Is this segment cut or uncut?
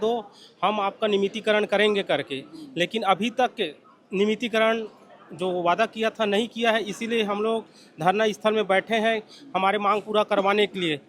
uncut